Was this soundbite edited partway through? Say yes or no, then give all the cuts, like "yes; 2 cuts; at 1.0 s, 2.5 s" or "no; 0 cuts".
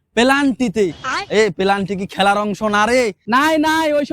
yes; 1 cut; at 3.2 s